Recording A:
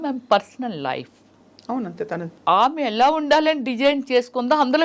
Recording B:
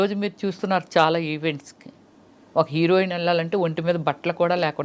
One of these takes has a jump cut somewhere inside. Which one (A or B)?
A